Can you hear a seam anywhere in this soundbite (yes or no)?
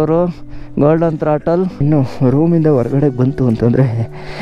yes